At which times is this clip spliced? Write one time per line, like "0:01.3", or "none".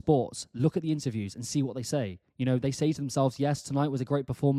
none